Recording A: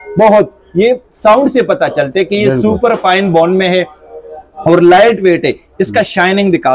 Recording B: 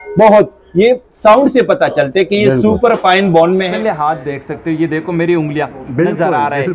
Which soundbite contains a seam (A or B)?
B